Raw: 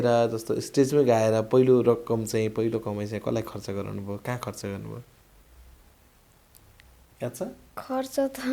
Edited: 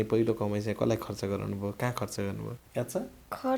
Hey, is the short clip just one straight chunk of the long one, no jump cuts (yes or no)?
no